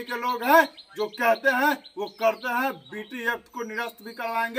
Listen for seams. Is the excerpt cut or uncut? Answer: uncut